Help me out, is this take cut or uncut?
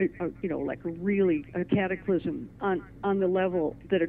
uncut